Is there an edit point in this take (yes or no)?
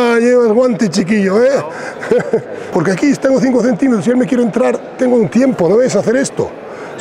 yes